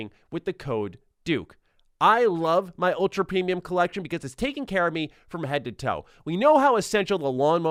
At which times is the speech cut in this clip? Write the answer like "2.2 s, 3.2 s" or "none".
none